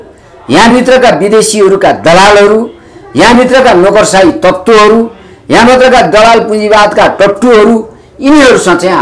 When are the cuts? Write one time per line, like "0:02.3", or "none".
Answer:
none